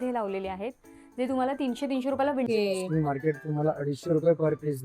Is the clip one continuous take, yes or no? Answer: no